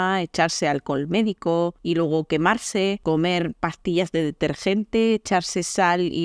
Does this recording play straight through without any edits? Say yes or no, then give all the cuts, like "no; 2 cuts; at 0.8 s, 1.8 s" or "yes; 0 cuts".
no; 2 cuts; at 1.8 s, 3.0 s